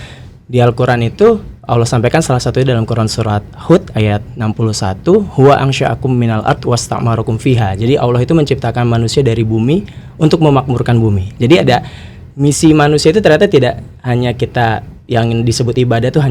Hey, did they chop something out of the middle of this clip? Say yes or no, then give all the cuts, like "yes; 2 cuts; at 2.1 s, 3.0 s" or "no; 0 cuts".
no; 0 cuts